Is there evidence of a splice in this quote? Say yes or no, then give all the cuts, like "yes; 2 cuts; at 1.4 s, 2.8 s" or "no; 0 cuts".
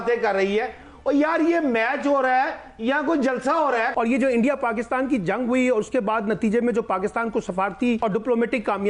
yes; 2 cuts; at 3.9 s, 8.0 s